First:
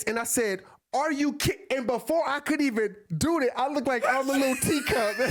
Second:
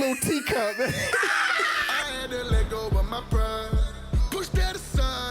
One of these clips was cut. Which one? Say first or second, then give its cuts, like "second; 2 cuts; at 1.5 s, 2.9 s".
second; 1 cut; at 1.8 s